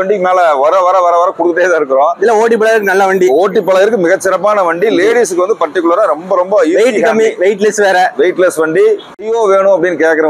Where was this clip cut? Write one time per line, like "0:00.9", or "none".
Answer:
0:09.1